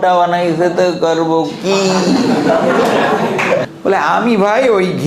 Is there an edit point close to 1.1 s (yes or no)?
no